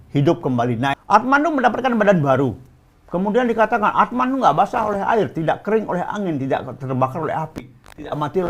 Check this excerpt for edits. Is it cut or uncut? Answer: cut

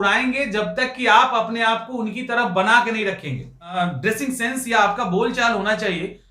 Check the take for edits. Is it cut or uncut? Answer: cut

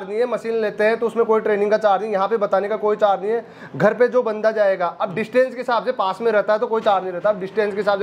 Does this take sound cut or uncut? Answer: uncut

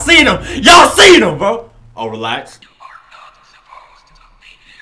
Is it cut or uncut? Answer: cut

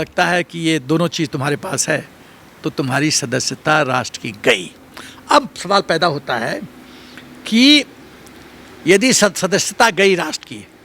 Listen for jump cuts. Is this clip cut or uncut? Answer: uncut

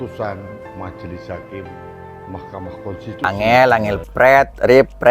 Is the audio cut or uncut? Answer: cut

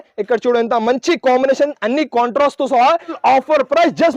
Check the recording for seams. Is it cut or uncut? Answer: cut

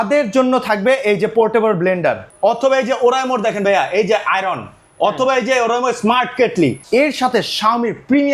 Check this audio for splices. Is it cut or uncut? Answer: cut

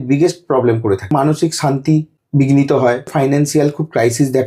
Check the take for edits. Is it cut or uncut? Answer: cut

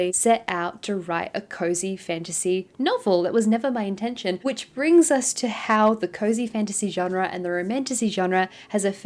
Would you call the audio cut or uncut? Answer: uncut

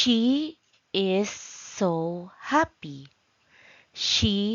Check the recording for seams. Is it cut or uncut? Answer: uncut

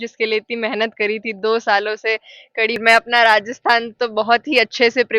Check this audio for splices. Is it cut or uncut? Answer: cut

